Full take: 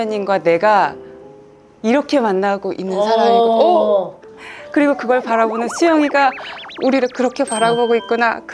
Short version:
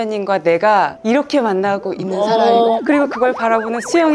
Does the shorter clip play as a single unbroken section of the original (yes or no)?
no